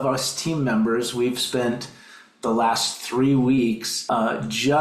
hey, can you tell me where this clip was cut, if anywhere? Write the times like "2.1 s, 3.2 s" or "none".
3.9 s